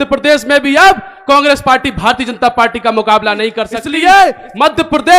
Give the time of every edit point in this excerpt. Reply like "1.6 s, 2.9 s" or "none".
3.8 s